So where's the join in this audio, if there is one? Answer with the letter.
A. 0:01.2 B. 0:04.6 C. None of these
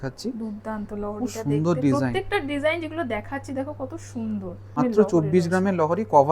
B